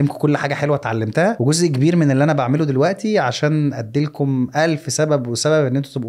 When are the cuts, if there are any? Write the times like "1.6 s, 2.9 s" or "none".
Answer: 1.4 s